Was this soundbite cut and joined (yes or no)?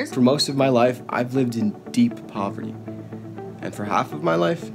no